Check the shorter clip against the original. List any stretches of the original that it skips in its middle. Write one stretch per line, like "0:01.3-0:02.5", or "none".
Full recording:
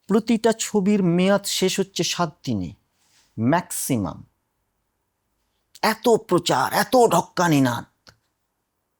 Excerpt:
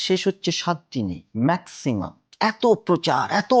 0:02.7-0:03.3
0:04.2-0:05.6